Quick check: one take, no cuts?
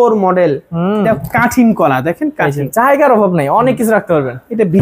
yes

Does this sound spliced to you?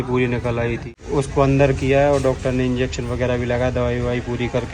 yes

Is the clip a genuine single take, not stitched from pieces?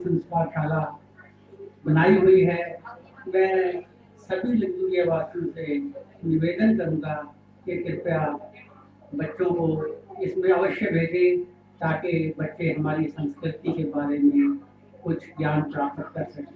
yes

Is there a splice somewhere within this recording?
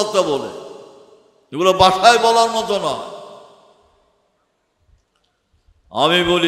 no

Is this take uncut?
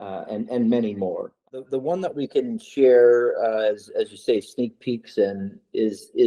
no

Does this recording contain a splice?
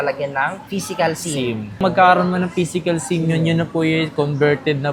no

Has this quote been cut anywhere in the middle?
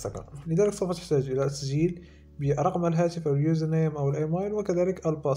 no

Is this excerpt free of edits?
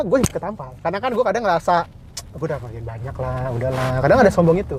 yes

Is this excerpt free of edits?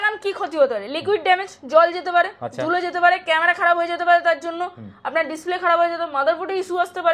yes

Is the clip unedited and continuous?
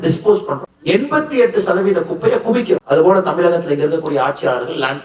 no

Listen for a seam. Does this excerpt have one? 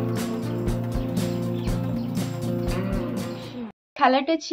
yes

